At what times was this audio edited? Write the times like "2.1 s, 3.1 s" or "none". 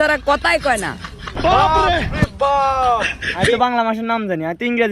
3.6 s